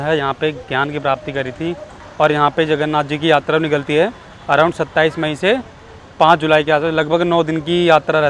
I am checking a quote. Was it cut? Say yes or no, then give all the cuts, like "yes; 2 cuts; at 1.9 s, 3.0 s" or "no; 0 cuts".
yes; 1 cut; at 2.0 s